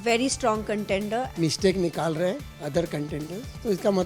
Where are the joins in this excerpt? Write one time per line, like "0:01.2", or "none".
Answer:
0:01.3
0:02.5